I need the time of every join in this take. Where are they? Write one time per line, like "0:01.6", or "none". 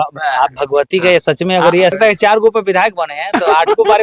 0:01.9